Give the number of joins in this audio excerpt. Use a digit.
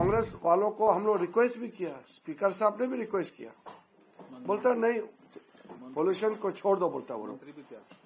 0